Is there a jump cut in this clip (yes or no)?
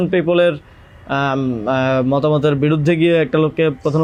no